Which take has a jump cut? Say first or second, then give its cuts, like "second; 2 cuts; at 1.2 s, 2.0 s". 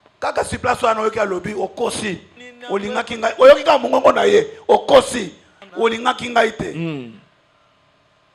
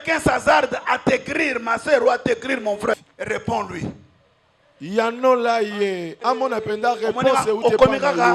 second; 1 cut; at 2.9 s